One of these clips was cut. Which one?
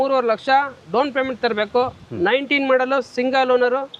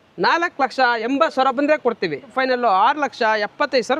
second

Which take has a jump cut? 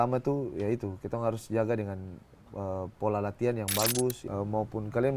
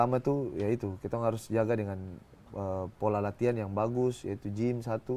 first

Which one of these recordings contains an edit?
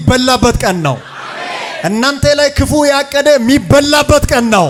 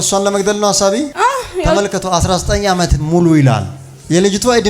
second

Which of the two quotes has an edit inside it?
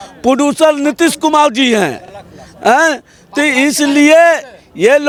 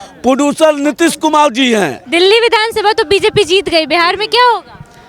second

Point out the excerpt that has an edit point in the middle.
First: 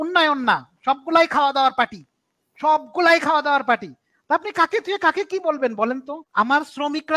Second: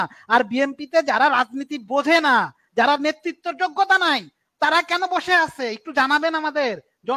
first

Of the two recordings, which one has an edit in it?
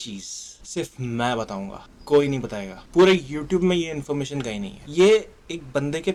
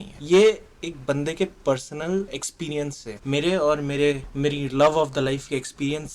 second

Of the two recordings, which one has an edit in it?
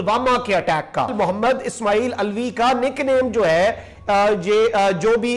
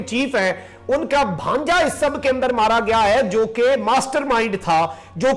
first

